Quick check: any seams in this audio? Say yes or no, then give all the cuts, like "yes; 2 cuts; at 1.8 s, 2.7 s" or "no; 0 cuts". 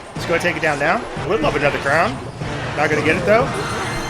yes; 1 cut; at 1.3 s